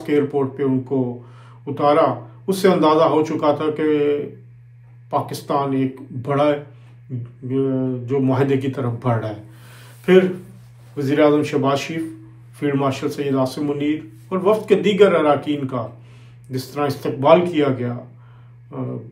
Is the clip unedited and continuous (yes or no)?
yes